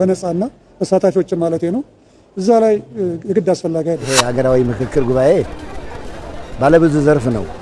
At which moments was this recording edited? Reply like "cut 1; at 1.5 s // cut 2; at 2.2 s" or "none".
cut 1; at 4.1 s